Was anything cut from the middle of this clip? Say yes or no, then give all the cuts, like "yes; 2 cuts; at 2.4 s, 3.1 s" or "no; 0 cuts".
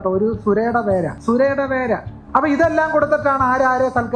yes; 2 cuts; at 1.1 s, 2.1 s